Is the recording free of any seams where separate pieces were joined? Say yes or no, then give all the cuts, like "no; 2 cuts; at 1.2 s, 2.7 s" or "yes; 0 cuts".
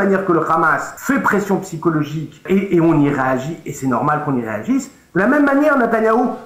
no; 2 cuts; at 0.9 s, 2.4 s